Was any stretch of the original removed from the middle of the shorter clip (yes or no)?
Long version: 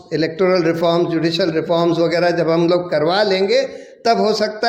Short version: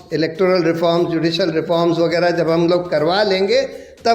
no